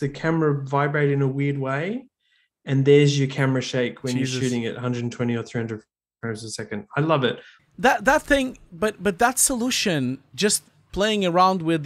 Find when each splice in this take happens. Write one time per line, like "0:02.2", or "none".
0:07.6